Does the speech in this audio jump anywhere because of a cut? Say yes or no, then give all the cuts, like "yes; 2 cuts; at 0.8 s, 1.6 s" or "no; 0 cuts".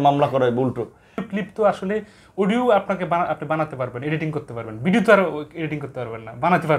yes; 1 cut; at 1.2 s